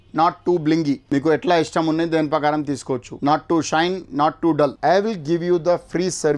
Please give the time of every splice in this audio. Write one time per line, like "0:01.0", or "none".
0:01.0
0:03.1
0:04.8

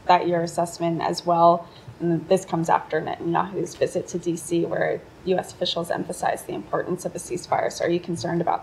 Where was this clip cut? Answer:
none

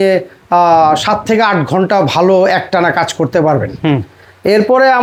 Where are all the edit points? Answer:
none

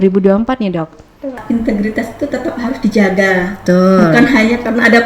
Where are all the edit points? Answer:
0:01.4

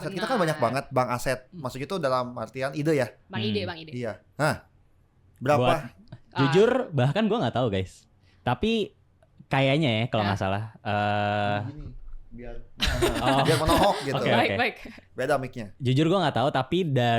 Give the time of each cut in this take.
none

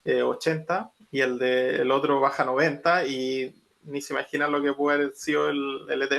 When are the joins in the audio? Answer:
0:01.0

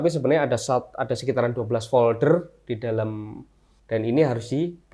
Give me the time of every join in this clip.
0:03.8

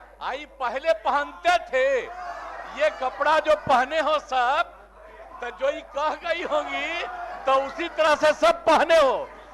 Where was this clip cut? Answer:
none

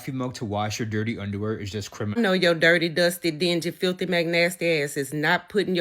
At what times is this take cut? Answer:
0:02.2

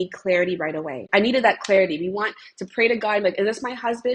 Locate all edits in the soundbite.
0:01.1

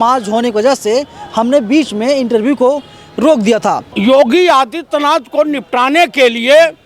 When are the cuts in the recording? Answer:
0:03.9

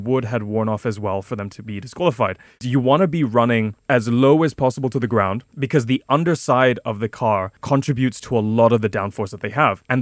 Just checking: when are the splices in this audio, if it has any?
0:02.6

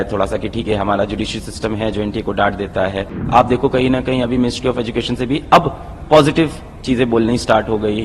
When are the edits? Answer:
0:03.2

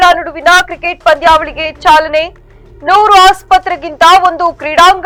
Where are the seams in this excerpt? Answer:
none

